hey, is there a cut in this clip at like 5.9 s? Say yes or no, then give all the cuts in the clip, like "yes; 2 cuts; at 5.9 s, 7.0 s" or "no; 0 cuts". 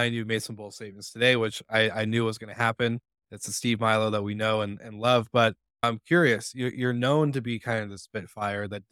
yes; 1 cut; at 5.9 s